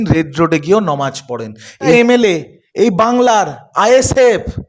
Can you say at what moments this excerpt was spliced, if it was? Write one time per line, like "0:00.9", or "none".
0:01.9